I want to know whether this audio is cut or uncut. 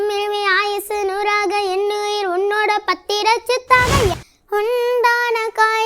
cut